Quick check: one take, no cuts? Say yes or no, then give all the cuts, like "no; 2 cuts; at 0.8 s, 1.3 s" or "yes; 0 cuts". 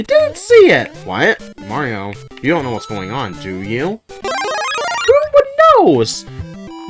yes; 0 cuts